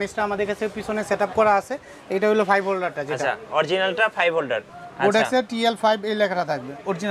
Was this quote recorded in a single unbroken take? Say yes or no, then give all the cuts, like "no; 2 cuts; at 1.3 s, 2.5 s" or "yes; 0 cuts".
no; 1 cut; at 4.6 s